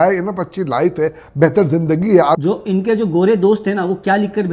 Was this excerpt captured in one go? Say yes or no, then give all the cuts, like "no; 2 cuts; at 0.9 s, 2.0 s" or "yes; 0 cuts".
no; 1 cut; at 2.4 s